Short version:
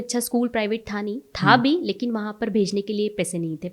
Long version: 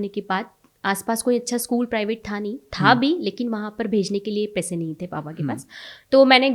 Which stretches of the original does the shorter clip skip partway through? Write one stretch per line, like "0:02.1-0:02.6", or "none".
none

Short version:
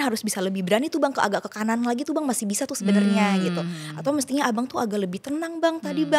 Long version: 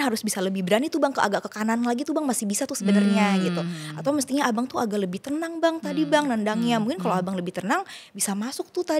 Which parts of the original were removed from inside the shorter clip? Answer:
none

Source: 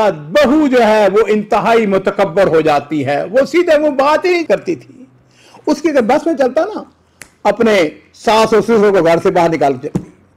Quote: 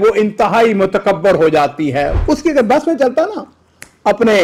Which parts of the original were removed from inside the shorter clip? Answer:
0:03.3-0:05.5

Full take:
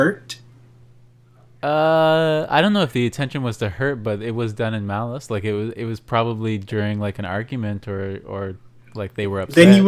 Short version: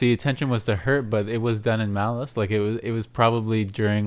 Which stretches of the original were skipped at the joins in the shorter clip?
none

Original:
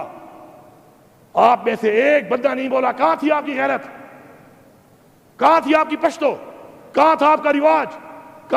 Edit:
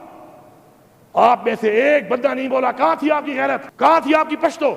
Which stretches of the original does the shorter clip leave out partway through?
0:03.9-0:05.3

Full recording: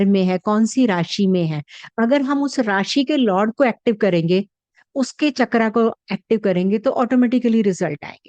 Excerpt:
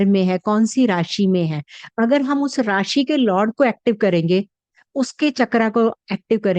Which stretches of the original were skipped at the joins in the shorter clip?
none

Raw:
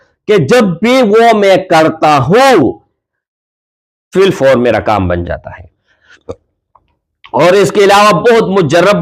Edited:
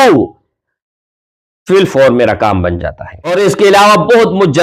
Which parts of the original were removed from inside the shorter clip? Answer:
0:05.8-0:07.5

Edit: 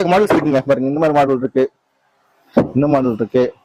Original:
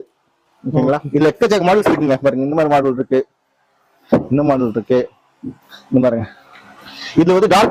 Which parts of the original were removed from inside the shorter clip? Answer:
none

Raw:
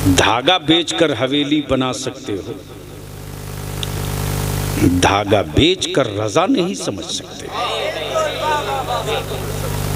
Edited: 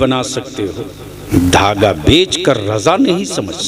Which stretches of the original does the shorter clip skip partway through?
0:03.0-0:04.8

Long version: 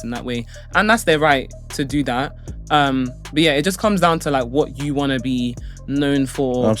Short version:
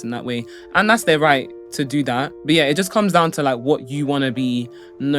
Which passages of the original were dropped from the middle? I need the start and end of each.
0:02.3-0:03.2

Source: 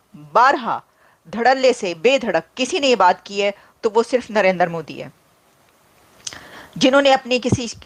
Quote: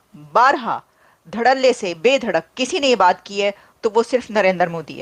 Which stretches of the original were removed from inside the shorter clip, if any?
none

